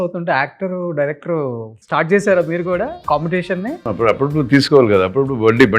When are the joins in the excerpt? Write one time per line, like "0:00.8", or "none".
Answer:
0:01.7
0:03.0
0:03.8